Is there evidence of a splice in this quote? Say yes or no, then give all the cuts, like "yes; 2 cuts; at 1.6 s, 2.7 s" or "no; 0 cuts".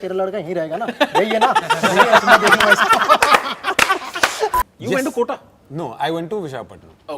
yes; 1 cut; at 4.6 s